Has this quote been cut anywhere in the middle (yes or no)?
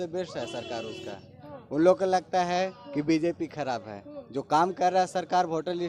no